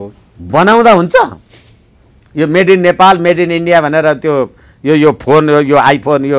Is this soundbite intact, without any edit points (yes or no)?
yes